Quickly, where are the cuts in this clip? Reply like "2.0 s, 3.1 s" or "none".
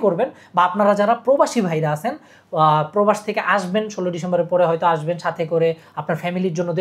none